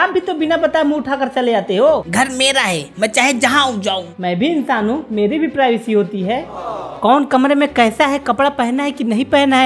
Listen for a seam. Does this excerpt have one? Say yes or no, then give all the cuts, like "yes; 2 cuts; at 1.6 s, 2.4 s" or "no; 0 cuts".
no; 0 cuts